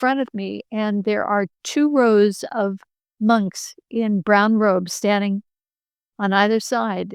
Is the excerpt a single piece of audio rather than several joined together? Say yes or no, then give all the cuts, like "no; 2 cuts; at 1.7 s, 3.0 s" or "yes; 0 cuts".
yes; 0 cuts